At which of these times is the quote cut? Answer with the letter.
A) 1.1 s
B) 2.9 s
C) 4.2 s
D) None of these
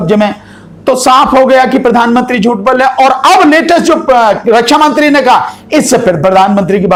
D